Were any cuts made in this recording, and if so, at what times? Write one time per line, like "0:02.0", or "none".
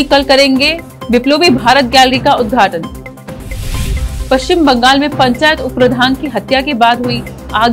none